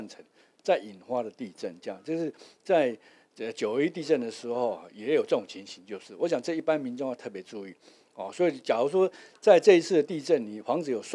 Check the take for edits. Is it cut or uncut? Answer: uncut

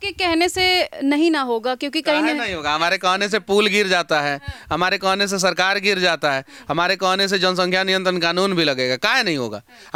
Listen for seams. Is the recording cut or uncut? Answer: uncut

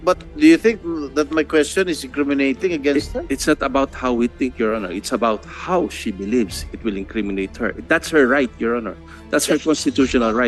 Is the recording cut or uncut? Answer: uncut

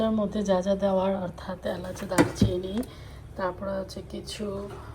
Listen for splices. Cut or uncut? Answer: uncut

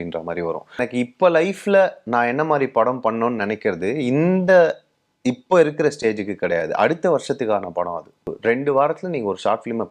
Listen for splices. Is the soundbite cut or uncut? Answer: cut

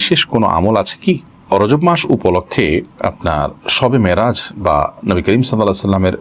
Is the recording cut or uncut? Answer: uncut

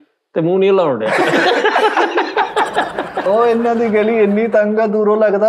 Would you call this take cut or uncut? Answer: cut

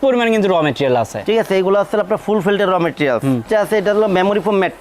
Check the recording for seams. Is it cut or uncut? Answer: cut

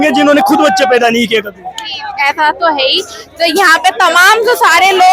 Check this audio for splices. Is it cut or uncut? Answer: uncut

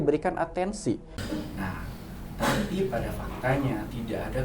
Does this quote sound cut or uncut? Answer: cut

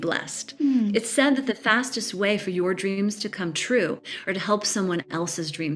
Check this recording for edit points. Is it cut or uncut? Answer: uncut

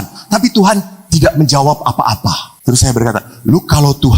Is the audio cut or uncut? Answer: cut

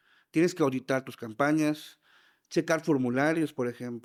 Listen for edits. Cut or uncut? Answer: uncut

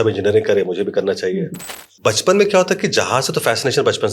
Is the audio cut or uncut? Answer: cut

